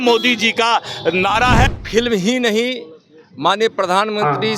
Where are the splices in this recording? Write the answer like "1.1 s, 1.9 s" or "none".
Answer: 1.8 s